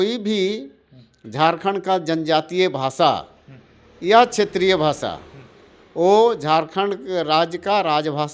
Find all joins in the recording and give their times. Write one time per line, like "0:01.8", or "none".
none